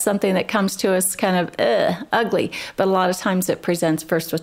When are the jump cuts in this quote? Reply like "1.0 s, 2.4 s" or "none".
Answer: none